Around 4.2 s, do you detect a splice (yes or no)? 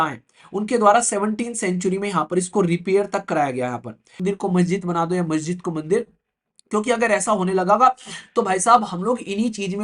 yes